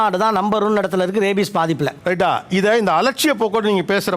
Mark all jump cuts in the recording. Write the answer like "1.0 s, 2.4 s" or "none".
2.0 s